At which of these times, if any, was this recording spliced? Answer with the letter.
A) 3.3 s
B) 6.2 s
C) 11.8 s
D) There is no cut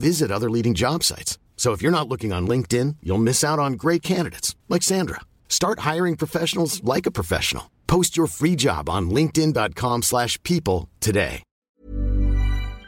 C